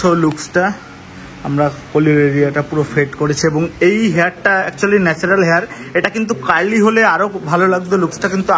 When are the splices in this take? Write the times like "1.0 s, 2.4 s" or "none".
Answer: none